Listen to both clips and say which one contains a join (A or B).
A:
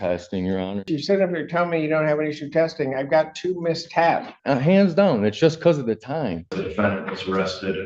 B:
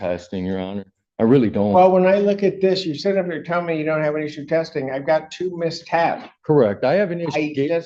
A